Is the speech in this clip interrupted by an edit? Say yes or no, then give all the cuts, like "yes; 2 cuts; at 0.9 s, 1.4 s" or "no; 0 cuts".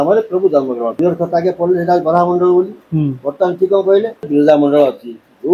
yes; 2 cuts; at 0.9 s, 4.3 s